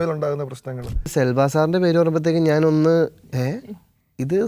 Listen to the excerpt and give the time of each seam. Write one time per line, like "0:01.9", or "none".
0:01.1